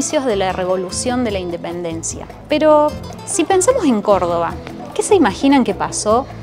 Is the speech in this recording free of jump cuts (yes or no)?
yes